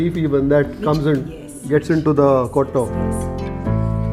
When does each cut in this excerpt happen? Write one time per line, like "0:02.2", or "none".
0:02.9